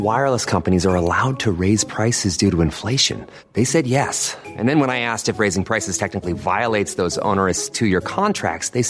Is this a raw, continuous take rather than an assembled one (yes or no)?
yes